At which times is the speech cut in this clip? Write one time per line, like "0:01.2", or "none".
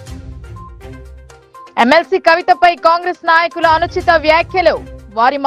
0:01.7